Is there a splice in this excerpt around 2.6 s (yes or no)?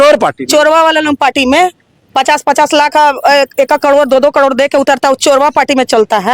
no